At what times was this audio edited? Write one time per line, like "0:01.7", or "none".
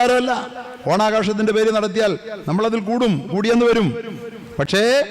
none